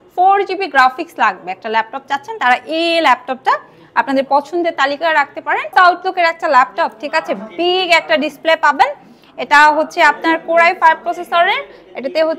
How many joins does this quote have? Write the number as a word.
one